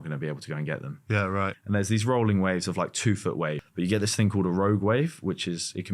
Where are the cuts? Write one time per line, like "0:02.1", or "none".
0:01.6
0:03.6